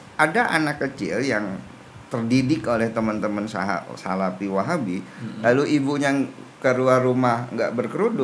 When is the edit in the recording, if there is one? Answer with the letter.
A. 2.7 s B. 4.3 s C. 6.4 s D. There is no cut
D